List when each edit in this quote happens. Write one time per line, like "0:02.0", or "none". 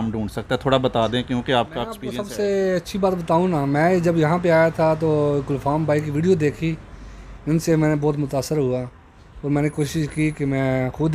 0:02.1